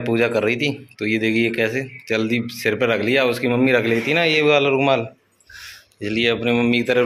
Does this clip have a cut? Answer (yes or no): no